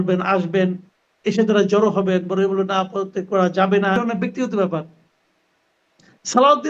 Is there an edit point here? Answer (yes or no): yes